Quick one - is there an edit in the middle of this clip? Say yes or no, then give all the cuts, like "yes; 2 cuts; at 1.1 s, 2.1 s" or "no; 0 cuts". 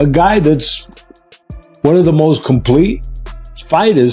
no; 0 cuts